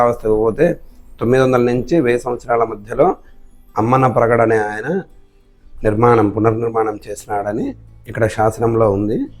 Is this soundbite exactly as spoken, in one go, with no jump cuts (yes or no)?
yes